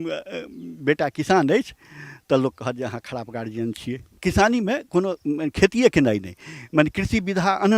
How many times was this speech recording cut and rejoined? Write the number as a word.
one